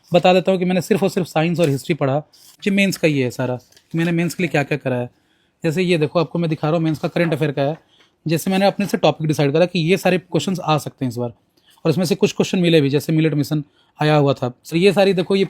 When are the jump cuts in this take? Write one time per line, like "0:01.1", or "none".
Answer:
0:02.5
0:14.6